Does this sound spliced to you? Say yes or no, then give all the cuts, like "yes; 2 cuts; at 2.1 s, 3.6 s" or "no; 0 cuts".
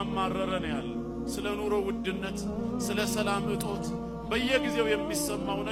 no; 0 cuts